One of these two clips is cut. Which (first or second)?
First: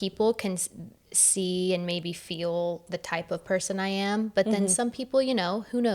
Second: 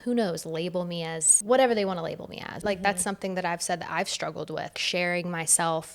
second